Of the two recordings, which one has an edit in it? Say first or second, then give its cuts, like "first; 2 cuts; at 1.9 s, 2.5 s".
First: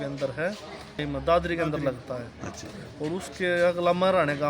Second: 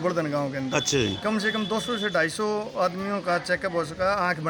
first; 1 cut; at 1.0 s